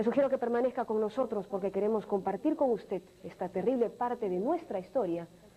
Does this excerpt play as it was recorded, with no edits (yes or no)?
no